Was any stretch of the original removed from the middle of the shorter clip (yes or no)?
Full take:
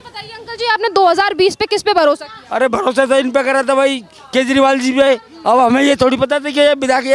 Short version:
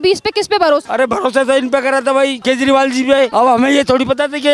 yes